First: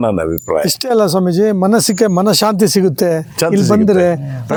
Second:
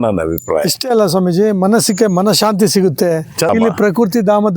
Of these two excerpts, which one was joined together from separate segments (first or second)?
second